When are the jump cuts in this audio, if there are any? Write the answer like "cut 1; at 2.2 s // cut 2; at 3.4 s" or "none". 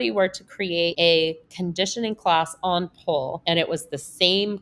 cut 1; at 0.9 s // cut 2; at 3.4 s